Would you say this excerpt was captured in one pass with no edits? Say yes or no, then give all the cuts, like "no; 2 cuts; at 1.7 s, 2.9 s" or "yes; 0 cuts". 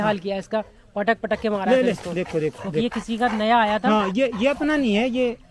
yes; 0 cuts